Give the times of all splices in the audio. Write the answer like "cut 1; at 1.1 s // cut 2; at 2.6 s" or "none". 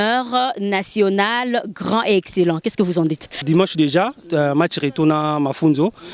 cut 1; at 3.3 s